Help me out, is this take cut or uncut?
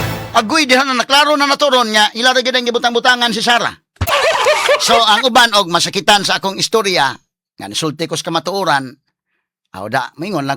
cut